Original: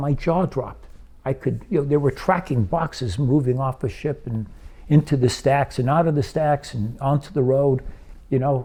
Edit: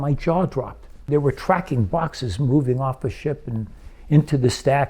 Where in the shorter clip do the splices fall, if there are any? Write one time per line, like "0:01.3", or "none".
0:01.1